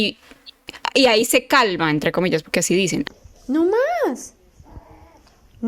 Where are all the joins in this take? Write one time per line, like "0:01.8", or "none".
0:03.1